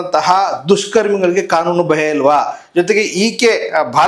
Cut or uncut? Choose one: uncut